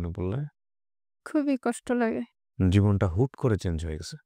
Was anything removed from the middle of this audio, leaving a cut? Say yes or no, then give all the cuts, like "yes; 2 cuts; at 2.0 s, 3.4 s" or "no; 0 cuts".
no; 0 cuts